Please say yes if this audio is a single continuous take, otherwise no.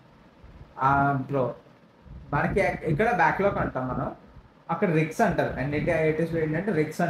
no